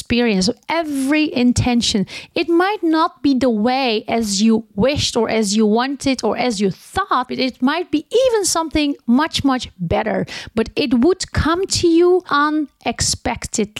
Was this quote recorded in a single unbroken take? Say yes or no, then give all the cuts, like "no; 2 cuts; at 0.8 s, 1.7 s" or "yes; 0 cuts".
no; 2 cuts; at 7.3 s, 12.3 s